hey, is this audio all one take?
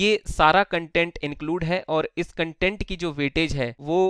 yes; 0 cuts

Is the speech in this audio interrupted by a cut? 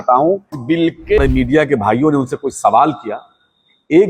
yes; 1 cut; at 1.2 s

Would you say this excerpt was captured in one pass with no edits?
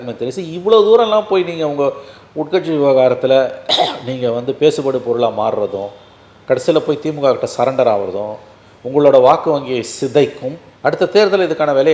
yes; 0 cuts

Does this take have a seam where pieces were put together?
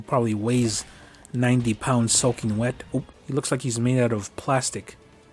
yes; 1 cut; at 3.2 s

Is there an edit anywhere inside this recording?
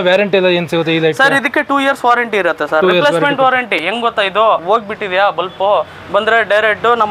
yes; 1 cut; at 4.6 s

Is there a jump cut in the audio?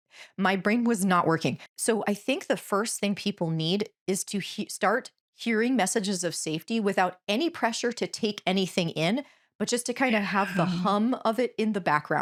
no; 0 cuts

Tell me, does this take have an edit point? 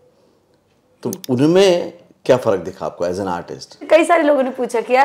yes; 1 cut; at 3.9 s

